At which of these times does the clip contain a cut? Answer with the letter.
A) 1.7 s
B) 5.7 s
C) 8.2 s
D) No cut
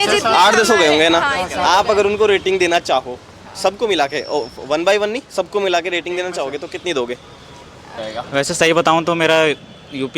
C